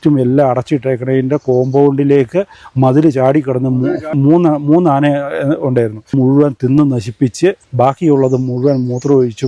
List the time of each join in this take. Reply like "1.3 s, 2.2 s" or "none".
4.1 s, 6.1 s, 7.7 s